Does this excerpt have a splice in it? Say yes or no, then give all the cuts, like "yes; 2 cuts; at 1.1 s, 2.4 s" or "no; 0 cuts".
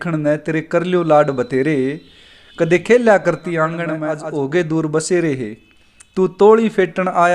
yes; 1 cut; at 4.0 s